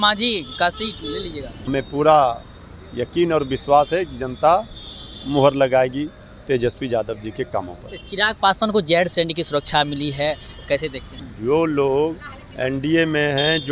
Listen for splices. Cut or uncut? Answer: cut